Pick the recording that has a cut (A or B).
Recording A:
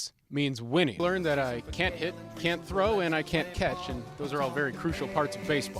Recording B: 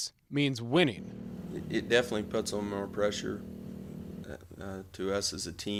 A